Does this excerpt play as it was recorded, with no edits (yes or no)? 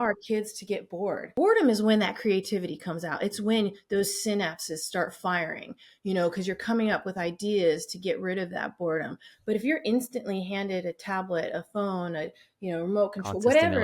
no